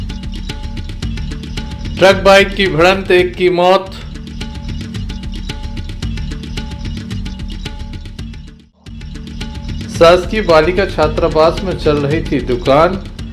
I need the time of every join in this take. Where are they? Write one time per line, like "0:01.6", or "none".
0:01.4